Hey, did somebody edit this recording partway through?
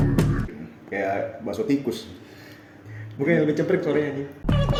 no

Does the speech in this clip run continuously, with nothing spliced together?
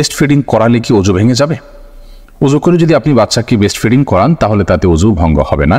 yes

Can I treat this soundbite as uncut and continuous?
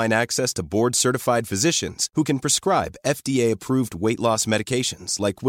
yes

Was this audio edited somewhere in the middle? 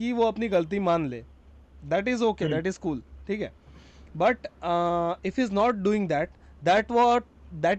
no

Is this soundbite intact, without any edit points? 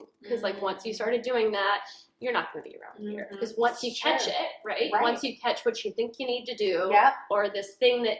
yes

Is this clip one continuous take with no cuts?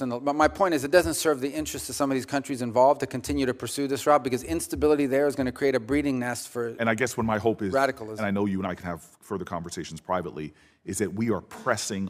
yes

